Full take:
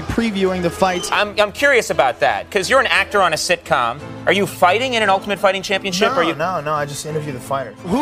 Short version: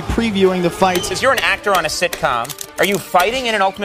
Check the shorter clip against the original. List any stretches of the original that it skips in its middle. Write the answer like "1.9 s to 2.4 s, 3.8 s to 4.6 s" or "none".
1.1 s to 2.6 s